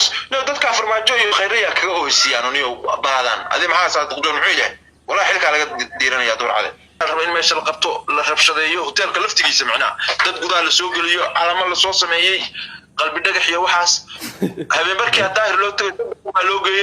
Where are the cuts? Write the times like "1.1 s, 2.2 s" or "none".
7.0 s